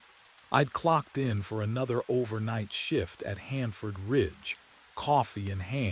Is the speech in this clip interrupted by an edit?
yes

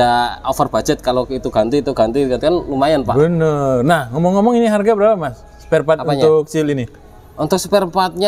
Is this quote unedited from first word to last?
yes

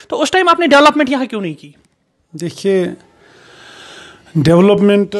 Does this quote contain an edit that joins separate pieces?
no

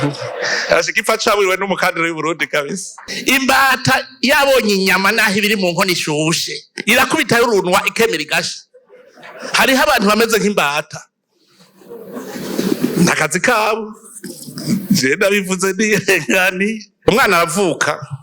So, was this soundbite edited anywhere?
yes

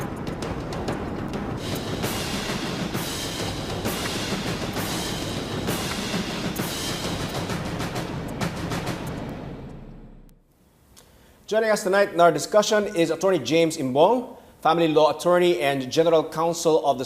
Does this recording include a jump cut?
yes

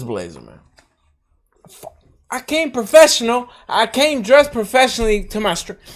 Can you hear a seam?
no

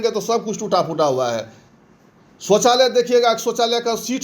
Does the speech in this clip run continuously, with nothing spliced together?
yes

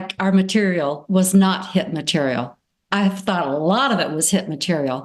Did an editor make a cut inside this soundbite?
no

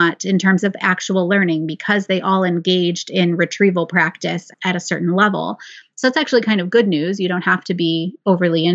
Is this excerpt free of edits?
no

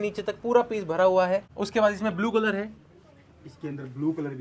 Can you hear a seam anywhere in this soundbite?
yes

